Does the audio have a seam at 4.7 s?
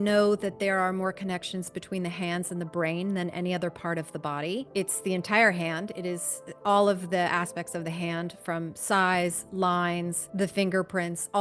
yes; 2 cuts; at 4.7 s, 10.2 s

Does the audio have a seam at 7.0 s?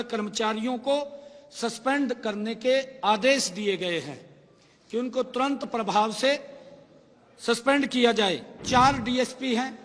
no; 1 cut; at 8.5 s

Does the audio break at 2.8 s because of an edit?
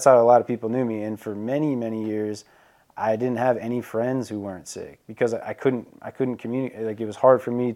no; 0 cuts

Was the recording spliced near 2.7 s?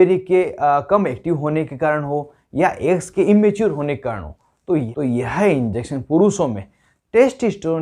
no; 1 cut; at 4.9 s

